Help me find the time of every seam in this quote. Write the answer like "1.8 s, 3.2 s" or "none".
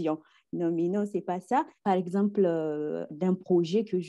1.7 s